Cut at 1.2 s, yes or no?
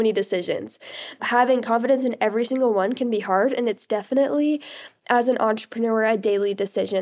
yes